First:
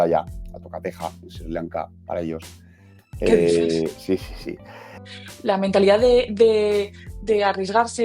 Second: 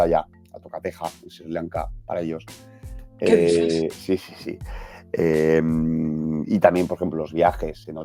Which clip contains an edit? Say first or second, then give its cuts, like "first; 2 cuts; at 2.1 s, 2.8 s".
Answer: first; 1 cut; at 5.0 s